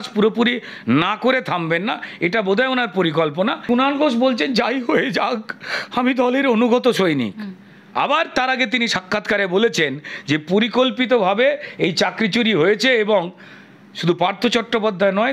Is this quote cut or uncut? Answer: cut